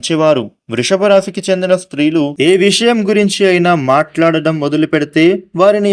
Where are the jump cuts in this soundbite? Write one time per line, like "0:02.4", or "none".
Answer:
0:02.3